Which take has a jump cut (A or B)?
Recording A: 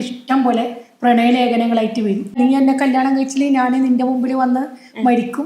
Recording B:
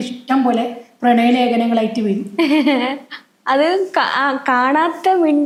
A